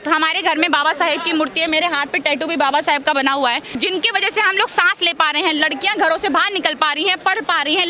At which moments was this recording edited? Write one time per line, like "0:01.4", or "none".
0:03.8